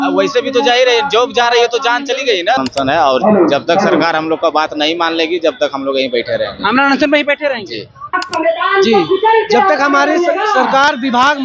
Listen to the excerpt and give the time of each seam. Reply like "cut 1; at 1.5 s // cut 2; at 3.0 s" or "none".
cut 1; at 2.6 s // cut 2; at 8.2 s